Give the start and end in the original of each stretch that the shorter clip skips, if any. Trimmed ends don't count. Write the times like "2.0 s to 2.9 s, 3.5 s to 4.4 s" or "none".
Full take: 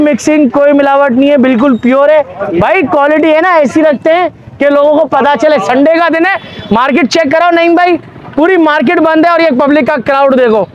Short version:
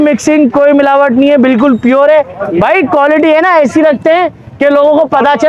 none